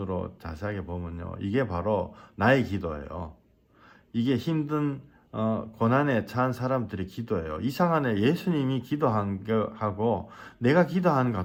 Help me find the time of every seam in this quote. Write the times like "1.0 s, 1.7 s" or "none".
none